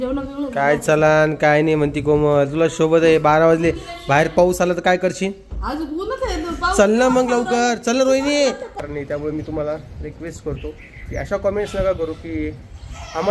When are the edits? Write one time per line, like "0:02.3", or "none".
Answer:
0:08.8